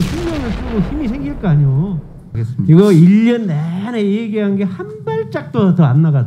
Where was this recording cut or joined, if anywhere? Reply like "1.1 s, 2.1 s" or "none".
2.4 s